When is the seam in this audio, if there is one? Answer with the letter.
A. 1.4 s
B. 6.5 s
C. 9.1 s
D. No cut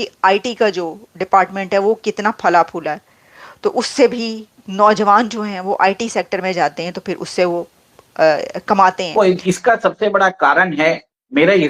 C